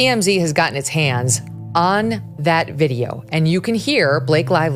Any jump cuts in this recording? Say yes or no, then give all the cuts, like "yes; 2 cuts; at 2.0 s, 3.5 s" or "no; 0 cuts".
no; 0 cuts